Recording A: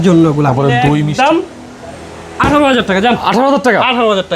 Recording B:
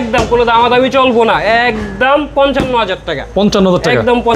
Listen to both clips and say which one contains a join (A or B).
A